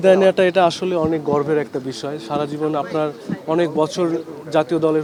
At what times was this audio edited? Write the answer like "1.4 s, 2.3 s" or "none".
none